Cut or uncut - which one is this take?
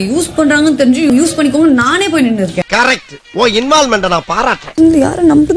cut